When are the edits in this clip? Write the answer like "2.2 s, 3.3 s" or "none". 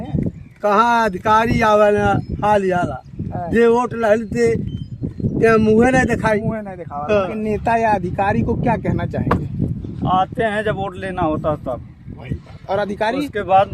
7.4 s